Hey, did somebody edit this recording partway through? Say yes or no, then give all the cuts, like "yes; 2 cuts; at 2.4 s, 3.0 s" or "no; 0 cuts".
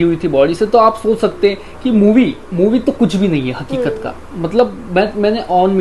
no; 0 cuts